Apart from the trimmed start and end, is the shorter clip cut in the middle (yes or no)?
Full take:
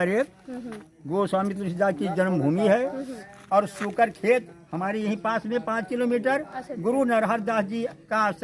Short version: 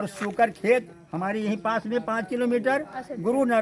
no